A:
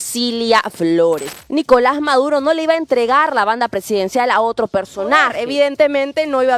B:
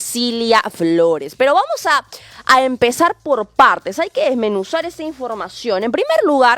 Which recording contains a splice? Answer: A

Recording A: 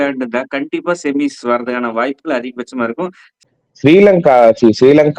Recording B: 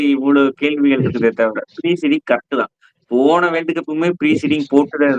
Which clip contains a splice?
A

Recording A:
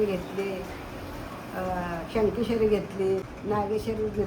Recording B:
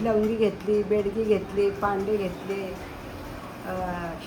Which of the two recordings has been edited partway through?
A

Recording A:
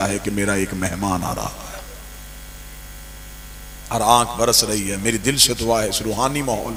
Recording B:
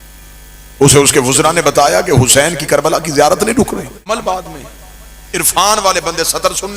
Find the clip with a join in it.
B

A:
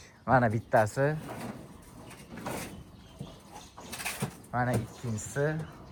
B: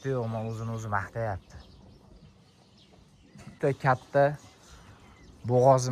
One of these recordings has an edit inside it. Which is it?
B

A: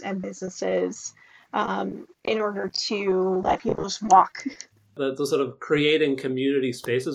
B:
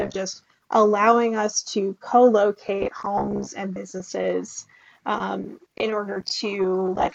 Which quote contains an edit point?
A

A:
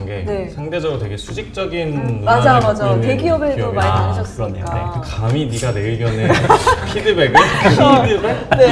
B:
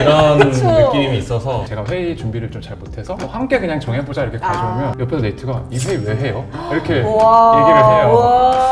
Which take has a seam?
B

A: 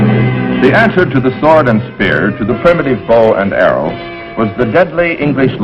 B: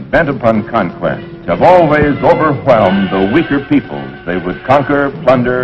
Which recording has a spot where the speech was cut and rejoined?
A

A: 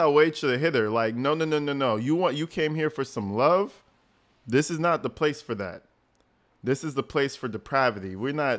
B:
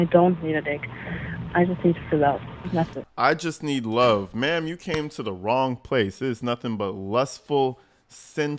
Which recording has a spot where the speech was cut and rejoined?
B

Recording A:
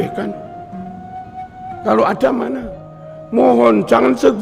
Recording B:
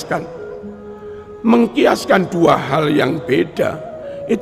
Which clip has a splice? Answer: A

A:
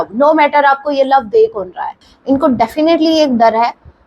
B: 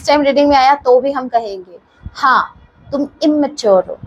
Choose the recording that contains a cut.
A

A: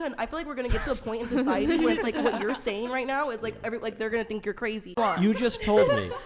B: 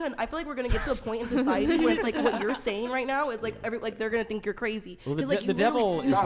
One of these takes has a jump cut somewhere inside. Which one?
A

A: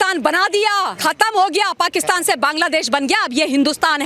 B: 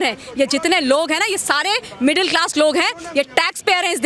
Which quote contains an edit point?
A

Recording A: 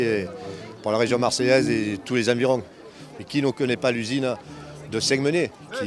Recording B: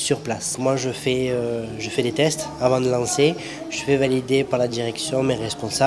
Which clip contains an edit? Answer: B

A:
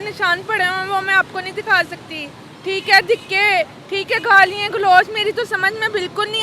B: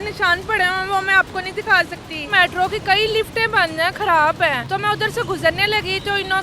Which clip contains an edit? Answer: B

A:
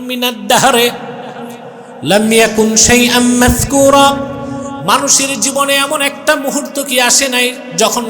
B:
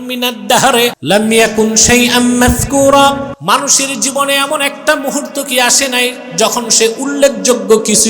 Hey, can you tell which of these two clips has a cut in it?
B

